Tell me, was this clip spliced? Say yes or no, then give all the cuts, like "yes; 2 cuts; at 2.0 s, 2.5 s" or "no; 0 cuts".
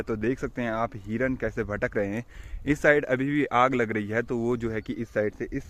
no; 0 cuts